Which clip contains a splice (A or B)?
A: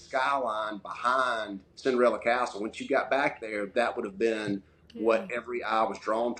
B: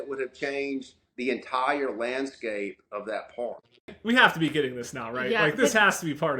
B